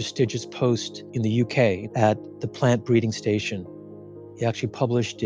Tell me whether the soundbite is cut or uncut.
cut